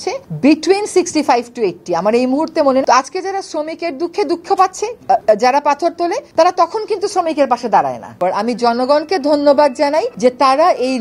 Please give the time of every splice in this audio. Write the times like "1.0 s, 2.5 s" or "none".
8.2 s